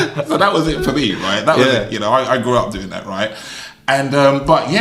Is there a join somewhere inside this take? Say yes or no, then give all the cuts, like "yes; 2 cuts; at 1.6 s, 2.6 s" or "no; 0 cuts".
no; 0 cuts